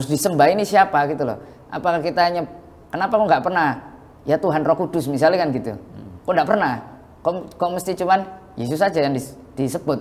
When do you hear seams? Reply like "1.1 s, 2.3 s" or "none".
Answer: none